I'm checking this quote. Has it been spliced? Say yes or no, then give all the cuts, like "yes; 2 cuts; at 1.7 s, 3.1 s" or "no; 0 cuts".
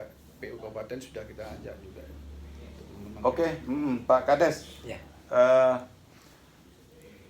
yes; 1 cut; at 2.9 s